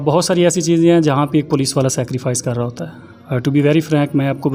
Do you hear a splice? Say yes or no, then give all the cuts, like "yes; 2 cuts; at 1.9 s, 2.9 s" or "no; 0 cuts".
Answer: no; 0 cuts